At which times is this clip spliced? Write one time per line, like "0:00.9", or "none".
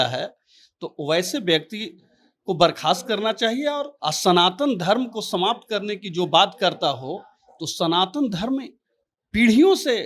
0:03.9